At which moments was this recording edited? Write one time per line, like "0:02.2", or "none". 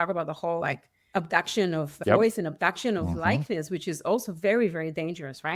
0:00.9